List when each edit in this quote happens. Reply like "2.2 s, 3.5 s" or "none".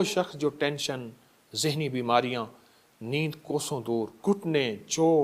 4.1 s